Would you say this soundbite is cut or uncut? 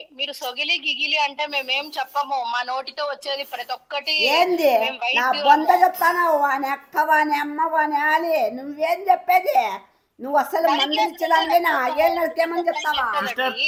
uncut